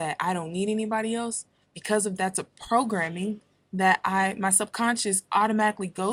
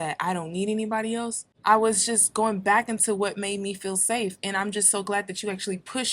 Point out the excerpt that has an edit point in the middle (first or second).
second